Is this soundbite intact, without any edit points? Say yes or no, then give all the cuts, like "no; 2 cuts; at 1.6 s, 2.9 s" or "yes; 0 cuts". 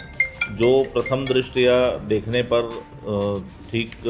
yes; 0 cuts